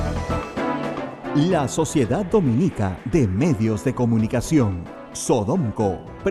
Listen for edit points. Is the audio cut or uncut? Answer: cut